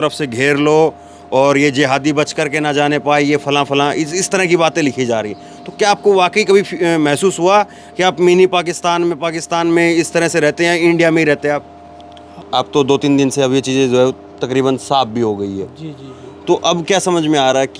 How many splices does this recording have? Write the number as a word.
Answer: one